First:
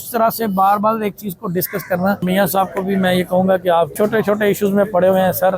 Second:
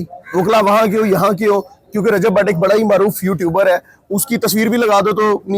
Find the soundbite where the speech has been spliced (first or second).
first